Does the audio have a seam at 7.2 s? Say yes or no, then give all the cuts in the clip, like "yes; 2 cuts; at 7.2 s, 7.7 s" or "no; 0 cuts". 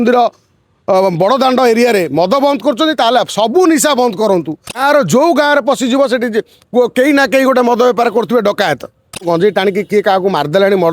no; 2 cuts; at 4.8 s, 9.3 s